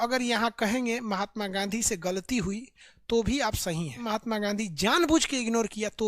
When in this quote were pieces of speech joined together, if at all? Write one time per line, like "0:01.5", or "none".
0:04.1